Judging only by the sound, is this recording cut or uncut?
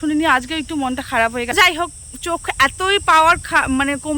cut